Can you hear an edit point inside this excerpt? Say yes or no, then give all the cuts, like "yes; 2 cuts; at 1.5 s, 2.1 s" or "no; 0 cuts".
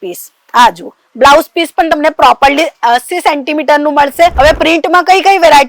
yes; 1 cut; at 4.3 s